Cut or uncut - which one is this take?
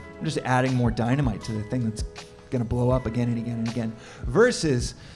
uncut